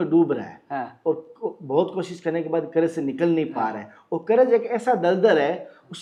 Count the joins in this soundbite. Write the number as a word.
zero